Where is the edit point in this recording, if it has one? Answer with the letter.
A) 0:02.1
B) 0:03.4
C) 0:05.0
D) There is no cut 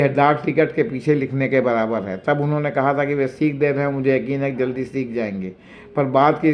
D